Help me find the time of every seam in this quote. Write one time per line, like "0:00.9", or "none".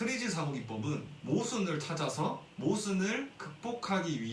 0:01.1
0:02.5